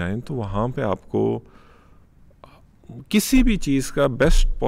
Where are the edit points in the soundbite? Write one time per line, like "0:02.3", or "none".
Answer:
none